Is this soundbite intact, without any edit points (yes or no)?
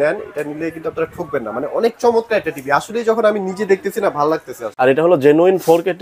no